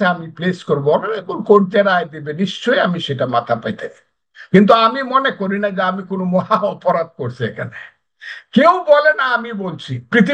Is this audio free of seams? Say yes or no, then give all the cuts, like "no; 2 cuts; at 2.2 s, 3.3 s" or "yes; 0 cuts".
yes; 0 cuts